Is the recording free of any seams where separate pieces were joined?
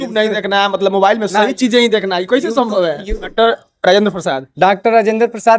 no; 1 cut; at 3.1 s

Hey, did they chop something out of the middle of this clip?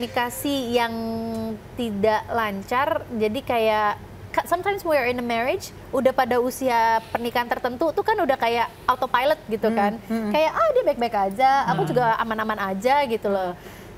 no; 0 cuts

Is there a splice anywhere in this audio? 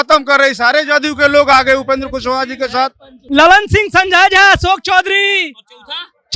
yes; 1 cut; at 3.1 s

